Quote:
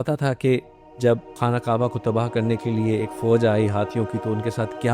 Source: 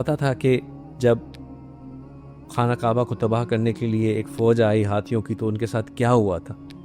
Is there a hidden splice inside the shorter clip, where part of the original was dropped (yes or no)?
yes